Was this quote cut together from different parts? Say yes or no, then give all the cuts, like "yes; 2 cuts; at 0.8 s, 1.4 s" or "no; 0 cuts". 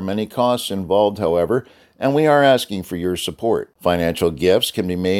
no; 0 cuts